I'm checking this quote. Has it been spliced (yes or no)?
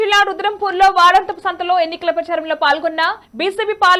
no